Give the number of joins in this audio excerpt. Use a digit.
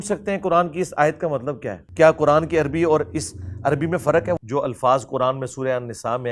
2